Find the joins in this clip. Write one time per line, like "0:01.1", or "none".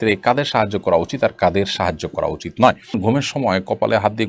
0:02.9